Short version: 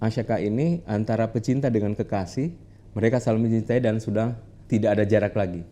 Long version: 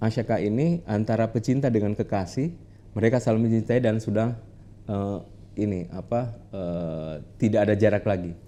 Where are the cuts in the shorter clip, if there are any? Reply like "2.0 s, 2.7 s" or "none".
4.5 s